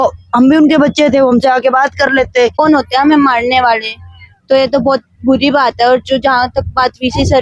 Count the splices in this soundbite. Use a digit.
1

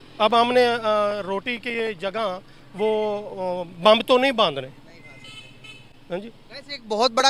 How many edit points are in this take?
0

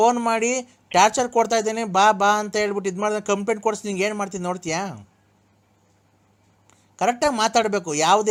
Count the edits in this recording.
0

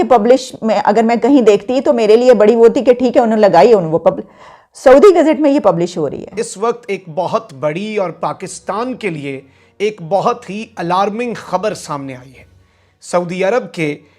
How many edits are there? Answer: 1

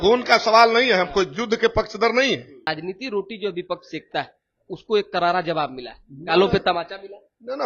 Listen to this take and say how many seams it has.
1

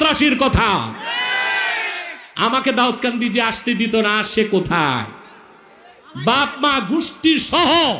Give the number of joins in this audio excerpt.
0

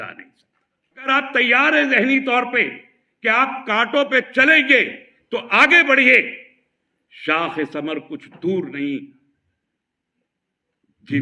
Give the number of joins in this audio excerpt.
1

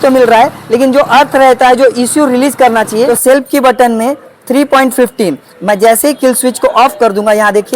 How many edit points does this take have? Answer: 1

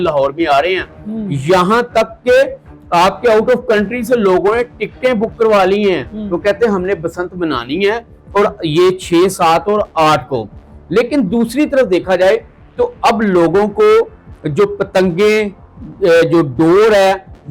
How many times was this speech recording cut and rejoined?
0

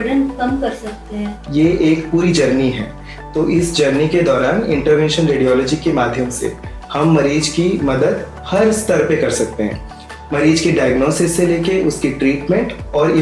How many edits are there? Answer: 1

